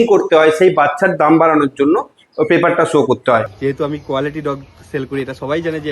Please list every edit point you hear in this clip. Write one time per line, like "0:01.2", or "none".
0:03.5